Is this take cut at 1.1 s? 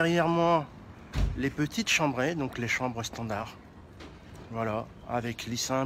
no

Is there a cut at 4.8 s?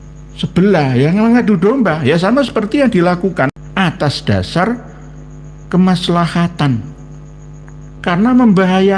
no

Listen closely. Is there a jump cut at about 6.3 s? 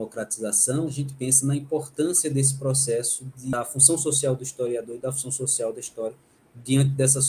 no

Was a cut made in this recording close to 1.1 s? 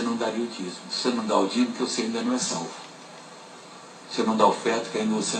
no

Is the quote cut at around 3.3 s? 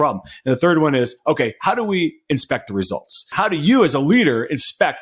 yes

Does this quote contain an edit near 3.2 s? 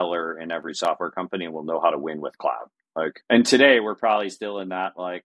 yes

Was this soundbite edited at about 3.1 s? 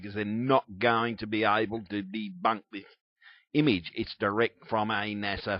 yes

